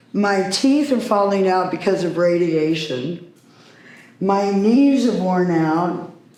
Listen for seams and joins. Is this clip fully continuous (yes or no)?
yes